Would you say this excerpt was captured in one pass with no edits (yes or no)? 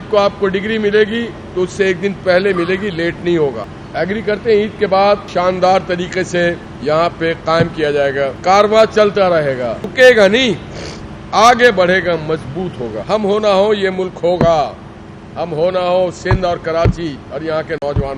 no